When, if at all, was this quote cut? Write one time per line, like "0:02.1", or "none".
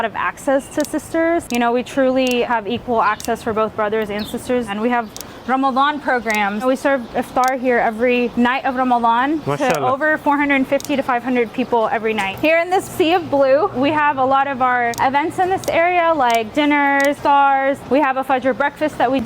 0:01.5
0:04.7
0:08.3
0:12.3
0:13.7
0:14.9
0:17.2